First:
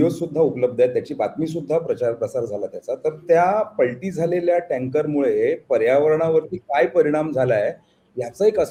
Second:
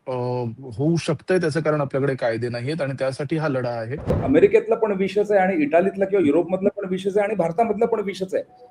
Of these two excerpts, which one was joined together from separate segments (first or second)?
second